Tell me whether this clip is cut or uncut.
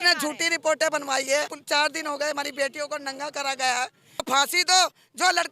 cut